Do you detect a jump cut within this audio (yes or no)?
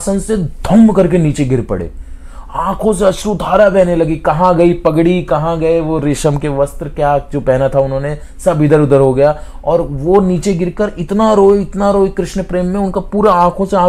no